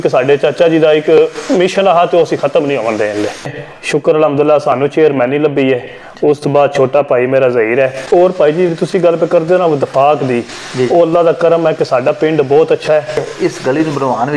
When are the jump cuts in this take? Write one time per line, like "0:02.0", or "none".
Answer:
0:03.5
0:08.1
0:13.3